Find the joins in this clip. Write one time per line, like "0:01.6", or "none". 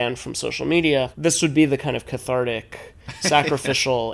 0:01.1